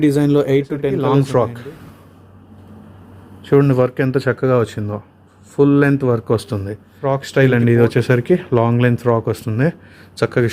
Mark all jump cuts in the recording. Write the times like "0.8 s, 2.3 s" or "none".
1.0 s, 7.0 s